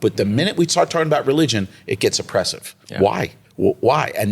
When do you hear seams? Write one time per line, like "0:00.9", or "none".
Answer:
0:03.4